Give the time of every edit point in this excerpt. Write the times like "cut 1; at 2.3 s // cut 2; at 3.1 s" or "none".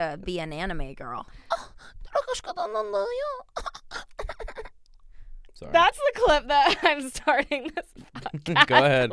cut 1; at 1.3 s